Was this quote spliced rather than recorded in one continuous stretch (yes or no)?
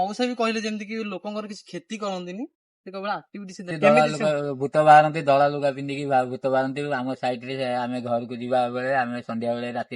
yes